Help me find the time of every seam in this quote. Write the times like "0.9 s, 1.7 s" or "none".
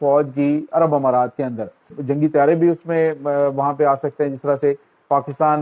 2.0 s